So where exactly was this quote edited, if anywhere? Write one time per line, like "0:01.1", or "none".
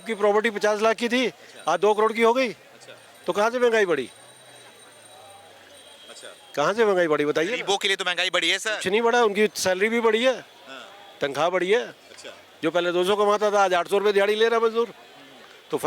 none

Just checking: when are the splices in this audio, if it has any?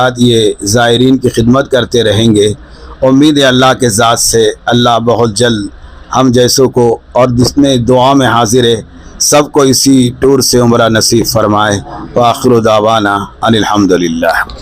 none

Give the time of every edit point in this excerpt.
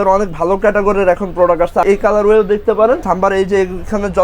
0:01.8
0:03.0

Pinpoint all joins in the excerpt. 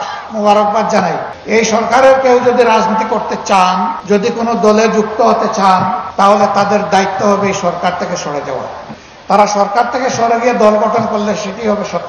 0:01.4

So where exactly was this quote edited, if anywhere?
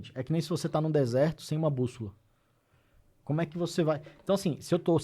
none

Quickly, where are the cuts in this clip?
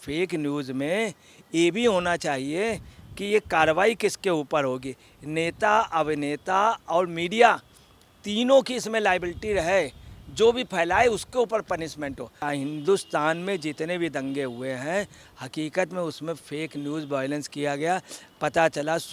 0:12.3

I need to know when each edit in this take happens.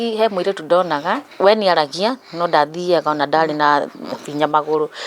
0:01.3

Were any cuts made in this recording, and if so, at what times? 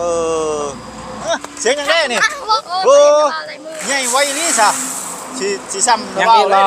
0:01.2
0:02.6

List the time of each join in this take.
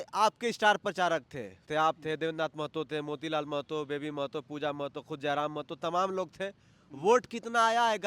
0:01.6

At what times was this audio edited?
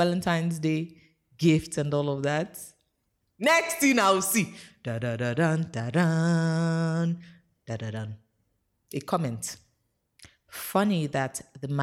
none

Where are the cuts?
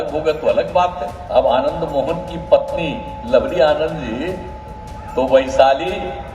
0:01.1

